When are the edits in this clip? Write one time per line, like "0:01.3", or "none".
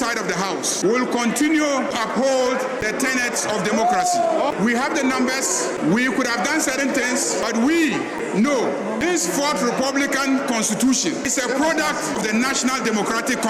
0:00.8
0:01.9
0:02.8
0:04.4
0:05.8
0:07.4
0:09.0
0:11.3
0:12.2